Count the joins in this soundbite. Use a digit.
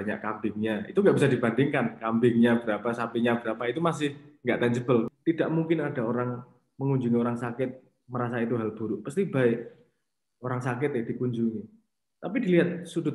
1